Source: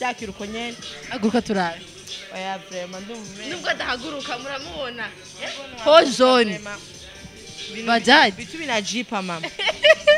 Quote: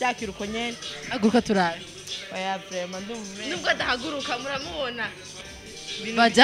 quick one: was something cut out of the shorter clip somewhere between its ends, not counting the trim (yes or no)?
yes